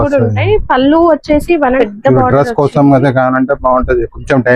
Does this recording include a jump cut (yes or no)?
yes